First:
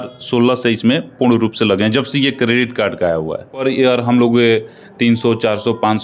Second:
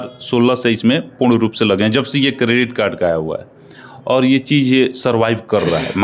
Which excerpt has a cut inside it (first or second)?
first